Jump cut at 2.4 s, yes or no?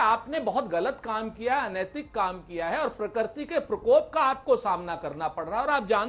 no